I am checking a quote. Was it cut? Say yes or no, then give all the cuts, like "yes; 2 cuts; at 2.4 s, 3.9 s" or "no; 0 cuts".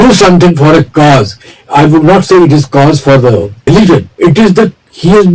yes; 1 cut; at 3.6 s